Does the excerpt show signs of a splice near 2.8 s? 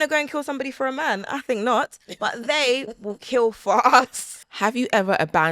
no; 1 cut; at 4.2 s

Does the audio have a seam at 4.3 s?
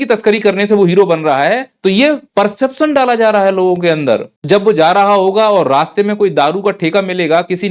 yes; 2 cuts; at 1.9 s, 4.3 s

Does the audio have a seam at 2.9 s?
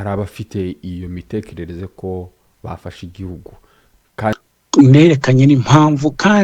no; 1 cut; at 4.3 s

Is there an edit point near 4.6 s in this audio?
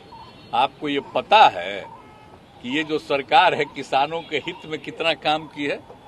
no; 0 cuts

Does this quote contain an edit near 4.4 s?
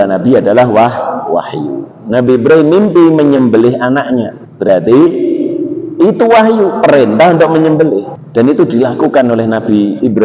yes; 2 cuts; at 4.4 s, 8.2 s

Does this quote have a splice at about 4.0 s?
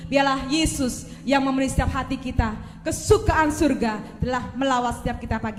no; 0 cuts

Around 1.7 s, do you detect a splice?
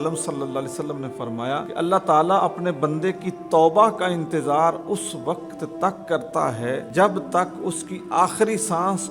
yes; 2 cuts; at 1.7 s, 6.9 s

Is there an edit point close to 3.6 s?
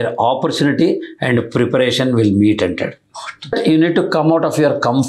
yes; 1 cut; at 3.6 s

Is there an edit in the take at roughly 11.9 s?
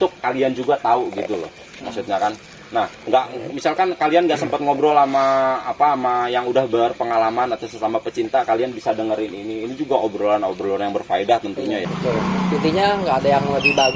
yes; 1 cut; at 11.9 s

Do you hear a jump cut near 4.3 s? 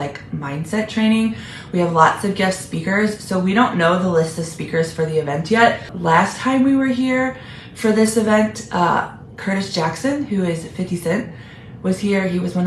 no; 1 cut; at 5.9 s

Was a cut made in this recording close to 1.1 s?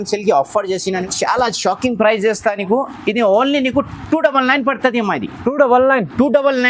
yes; 1 cut; at 1.1 s

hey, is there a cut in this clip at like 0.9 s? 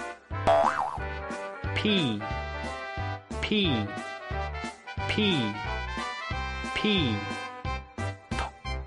yes; 1 cut; at 0.9 s

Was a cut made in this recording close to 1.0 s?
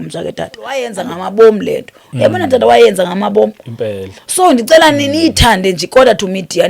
yes; 1 cut; at 1.0 s

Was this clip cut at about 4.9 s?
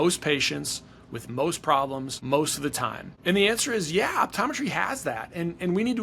no; 2 cuts; at 2.1 s, 3.0 s

